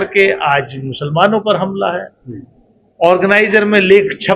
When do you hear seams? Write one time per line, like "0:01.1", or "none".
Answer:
none